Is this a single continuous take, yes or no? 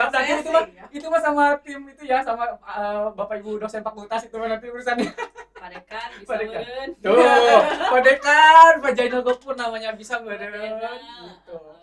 yes